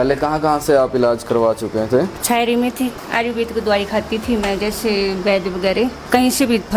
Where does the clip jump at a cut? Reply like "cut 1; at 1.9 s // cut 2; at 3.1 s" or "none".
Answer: none